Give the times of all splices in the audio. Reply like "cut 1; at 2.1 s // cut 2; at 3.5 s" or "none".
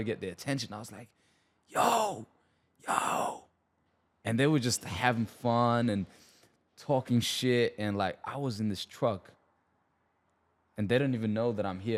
none